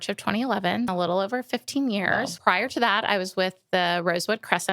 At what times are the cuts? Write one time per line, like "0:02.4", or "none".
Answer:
0:00.9
0:02.3